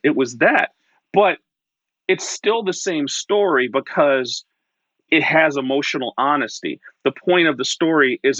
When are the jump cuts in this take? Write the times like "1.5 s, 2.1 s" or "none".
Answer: 5.1 s

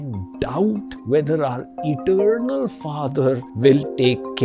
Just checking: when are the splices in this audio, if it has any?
0.9 s, 3.5 s

